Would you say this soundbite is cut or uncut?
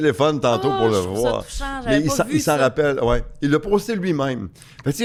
uncut